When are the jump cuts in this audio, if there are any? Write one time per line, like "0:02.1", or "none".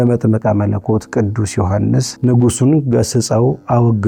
none